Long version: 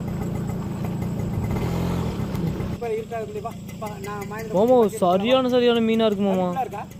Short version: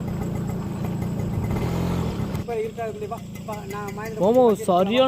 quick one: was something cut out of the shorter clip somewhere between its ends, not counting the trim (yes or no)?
yes